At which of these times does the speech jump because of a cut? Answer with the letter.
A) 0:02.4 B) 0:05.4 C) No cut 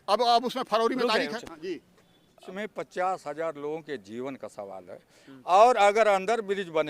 A